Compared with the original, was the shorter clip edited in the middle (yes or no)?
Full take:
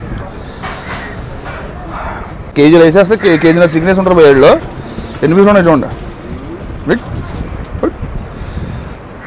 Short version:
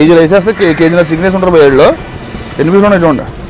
no